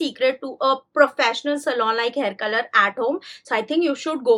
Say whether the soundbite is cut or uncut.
uncut